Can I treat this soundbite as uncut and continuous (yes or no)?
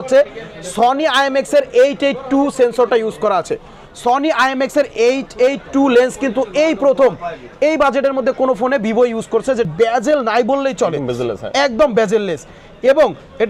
no